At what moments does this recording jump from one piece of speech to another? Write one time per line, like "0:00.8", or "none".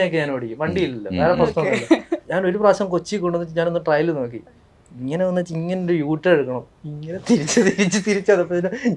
0:02.2